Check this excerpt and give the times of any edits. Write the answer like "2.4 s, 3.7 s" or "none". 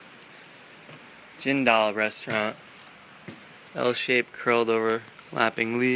none